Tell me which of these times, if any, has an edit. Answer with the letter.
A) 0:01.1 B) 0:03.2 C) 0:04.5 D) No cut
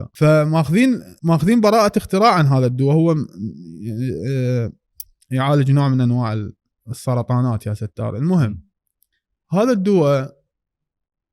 A